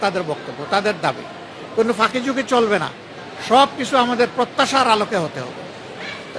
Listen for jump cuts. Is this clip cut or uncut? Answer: uncut